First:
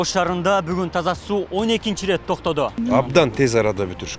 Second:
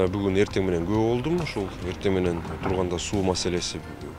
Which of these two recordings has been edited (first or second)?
first